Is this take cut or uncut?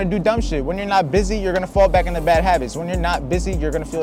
uncut